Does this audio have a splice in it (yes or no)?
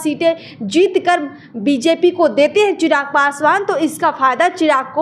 no